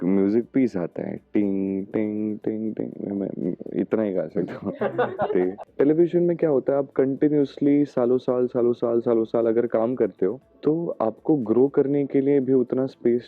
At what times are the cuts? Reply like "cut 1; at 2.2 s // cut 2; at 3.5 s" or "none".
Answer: cut 1; at 5.6 s

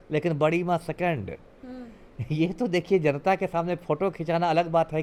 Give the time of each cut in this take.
none

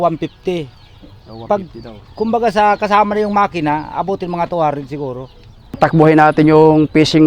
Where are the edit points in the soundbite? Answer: cut 1; at 5.8 s

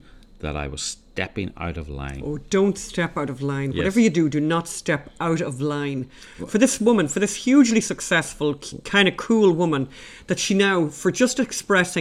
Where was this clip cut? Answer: cut 1; at 6.3 s

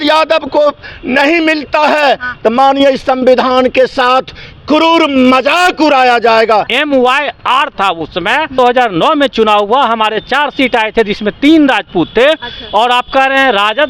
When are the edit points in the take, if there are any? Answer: cut 1; at 6.7 s // cut 2; at 8.6 s

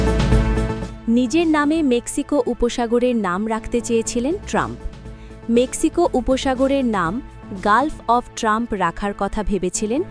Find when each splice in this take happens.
cut 1; at 0.9 s

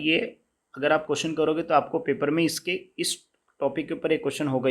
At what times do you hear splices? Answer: none

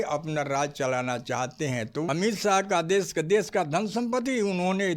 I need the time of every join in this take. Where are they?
cut 1; at 2.1 s

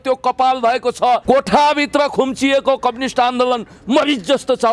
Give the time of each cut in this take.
cut 1; at 1.2 s

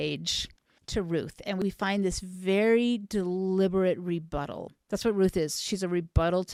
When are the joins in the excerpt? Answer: none

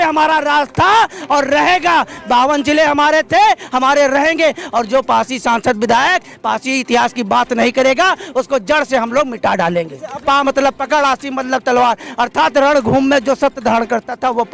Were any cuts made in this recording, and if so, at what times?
cut 1; at 10.1 s

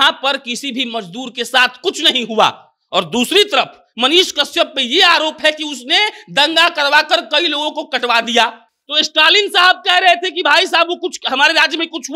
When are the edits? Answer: none

